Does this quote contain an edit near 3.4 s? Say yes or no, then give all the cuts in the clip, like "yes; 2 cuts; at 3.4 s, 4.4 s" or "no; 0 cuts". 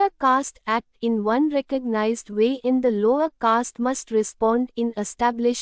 no; 0 cuts